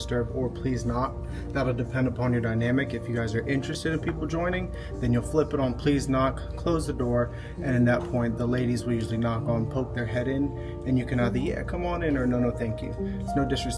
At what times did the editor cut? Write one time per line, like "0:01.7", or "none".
none